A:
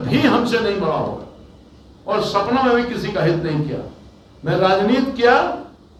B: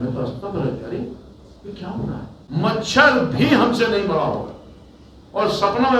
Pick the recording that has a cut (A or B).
B